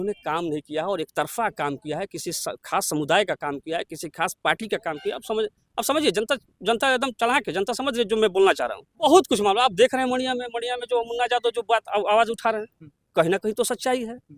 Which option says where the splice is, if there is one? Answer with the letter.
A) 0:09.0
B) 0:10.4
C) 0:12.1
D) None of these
A